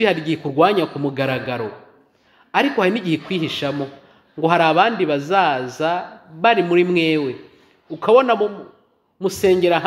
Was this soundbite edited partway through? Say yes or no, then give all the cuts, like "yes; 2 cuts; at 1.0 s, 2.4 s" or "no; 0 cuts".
no; 0 cuts